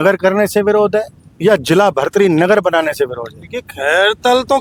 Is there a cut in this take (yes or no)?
no